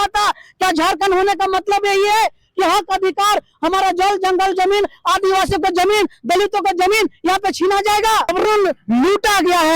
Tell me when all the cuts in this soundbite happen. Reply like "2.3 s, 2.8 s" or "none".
8.3 s